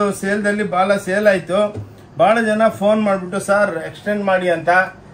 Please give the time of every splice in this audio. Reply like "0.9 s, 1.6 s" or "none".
none

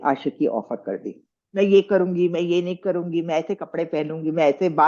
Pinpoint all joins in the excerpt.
1.3 s

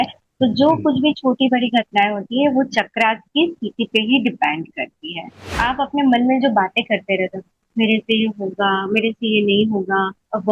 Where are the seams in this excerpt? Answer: 5.4 s

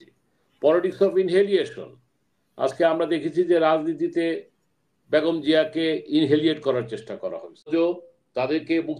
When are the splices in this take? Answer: 7.7 s

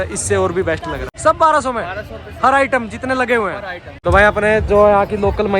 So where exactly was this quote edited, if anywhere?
1.0 s, 3.8 s

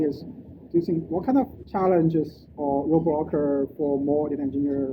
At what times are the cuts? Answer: 1.6 s

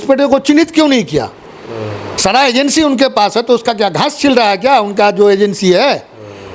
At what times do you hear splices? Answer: none

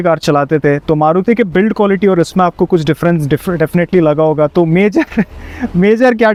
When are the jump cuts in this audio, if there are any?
none

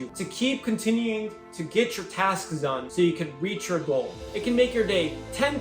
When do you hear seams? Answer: 2.8 s, 4.2 s

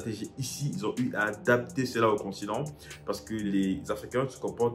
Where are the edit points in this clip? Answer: 3.4 s

